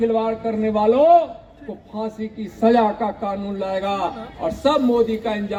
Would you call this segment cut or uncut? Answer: uncut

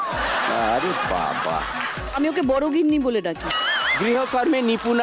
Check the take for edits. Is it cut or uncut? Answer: uncut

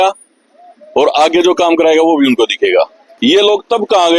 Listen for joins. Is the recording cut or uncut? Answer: cut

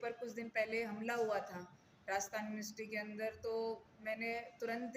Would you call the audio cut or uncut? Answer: uncut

